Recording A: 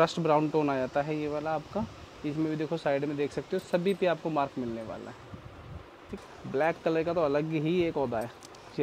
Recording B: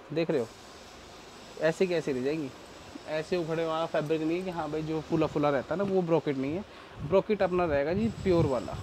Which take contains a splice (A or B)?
A